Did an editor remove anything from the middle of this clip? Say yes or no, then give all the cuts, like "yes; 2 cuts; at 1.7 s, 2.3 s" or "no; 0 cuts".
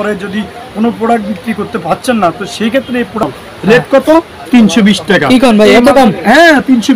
yes; 1 cut; at 3.2 s